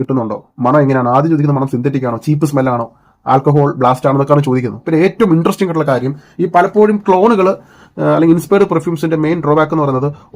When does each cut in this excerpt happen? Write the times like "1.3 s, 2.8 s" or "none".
4.8 s